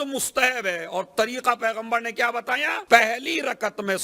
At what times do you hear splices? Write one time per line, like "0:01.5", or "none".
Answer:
0:02.8